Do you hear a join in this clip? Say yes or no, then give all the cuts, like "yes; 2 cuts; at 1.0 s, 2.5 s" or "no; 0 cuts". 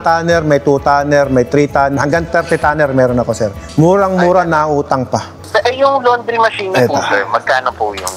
yes; 2 cuts; at 2.0 s, 5.3 s